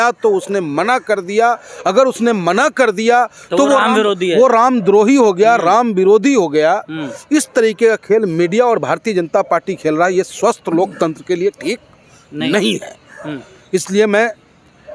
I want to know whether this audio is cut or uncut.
uncut